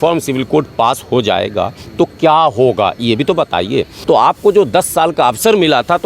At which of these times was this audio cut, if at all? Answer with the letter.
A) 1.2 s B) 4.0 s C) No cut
B